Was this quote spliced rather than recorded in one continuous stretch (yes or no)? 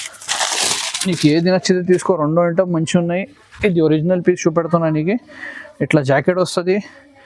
no